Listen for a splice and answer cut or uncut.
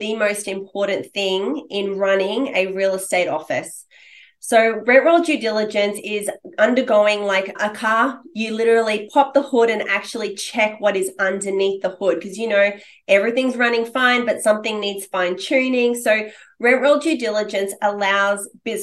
cut